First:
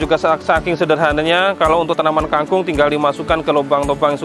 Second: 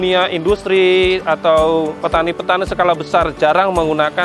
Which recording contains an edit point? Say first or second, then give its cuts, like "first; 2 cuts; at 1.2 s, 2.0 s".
second; 1 cut; at 2.0 s